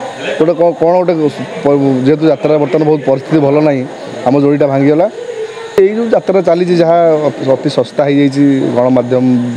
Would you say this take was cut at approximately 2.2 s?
no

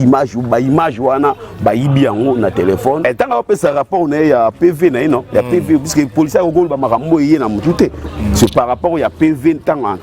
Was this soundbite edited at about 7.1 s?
no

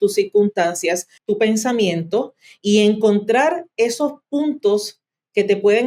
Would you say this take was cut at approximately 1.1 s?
yes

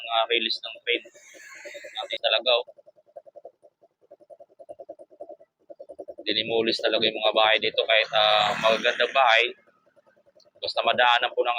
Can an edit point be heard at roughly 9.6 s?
no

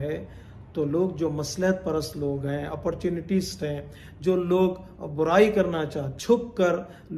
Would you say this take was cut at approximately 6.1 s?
yes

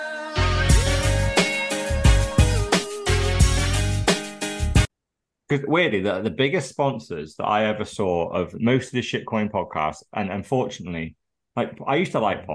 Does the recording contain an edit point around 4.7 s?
no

